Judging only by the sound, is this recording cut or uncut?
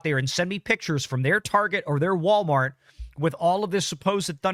uncut